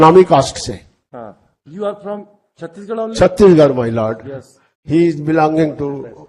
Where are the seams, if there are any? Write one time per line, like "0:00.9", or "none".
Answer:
none